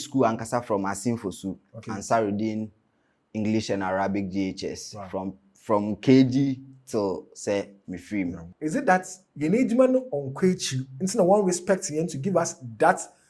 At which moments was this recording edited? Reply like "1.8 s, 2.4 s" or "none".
8.5 s